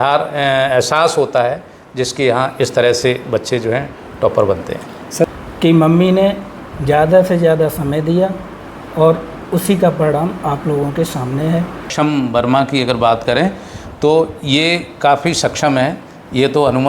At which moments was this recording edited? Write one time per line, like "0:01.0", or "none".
0:05.3
0:11.9